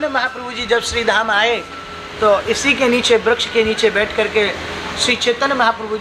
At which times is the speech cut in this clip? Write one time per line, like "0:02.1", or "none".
none